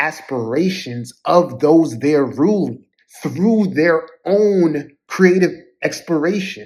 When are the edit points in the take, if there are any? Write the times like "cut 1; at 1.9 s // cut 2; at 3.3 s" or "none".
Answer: none